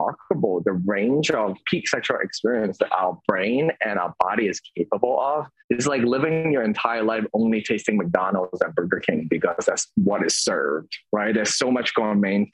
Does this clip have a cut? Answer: yes; 3 cuts; at 1.6 s, 5.5 s, 10.9 s

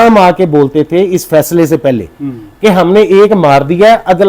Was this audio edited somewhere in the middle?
no; 0 cuts

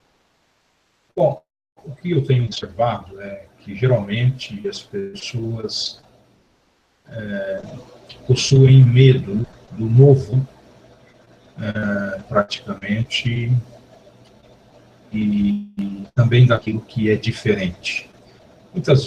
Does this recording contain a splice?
yes; 1 cut; at 16.3 s

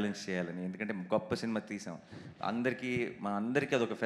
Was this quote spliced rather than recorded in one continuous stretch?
no; 0 cuts

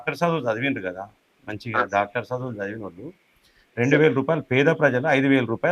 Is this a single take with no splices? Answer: yes; 0 cuts

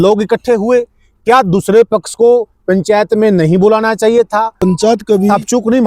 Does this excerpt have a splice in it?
yes; 1 cut; at 4.6 s

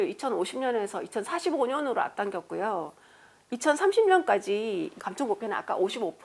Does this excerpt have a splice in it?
yes; 1 cut; at 4.9 s

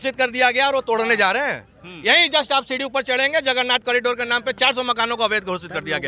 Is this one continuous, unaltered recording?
yes; 0 cuts

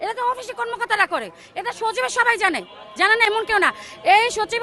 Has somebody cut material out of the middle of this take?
no; 0 cuts

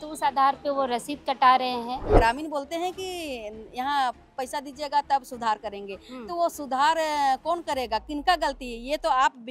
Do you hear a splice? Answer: yes; 1 cut; at 2.2 s

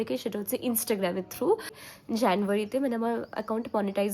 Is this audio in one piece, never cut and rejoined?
no; 1 cut; at 1.8 s

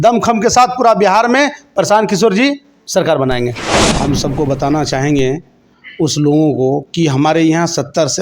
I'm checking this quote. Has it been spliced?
yes; 1 cut; at 3.8 s

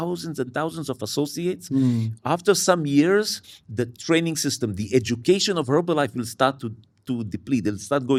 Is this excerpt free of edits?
yes; 0 cuts

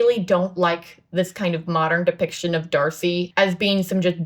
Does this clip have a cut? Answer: yes; 1 cut; at 3.3 s

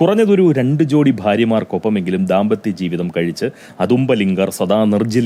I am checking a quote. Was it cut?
no; 0 cuts

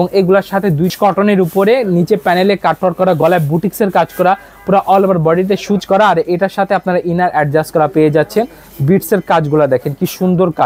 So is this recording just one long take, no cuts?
no; 2 cuts; at 0.9 s, 5.8 s

